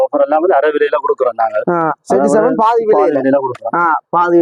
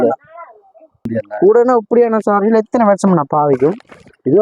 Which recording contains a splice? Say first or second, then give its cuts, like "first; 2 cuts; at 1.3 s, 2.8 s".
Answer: second; 1 cut; at 1.2 s